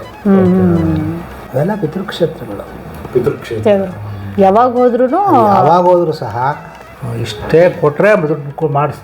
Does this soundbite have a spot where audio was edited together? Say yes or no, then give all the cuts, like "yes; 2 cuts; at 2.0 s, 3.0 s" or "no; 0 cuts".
yes; 1 cut; at 6.7 s